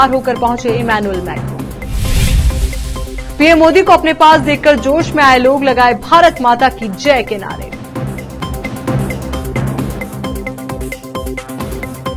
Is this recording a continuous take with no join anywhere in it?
yes; 0 cuts

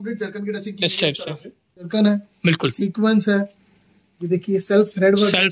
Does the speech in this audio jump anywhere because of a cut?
yes; 1 cut; at 1.9 s

